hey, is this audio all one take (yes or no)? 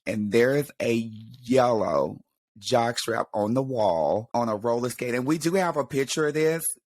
no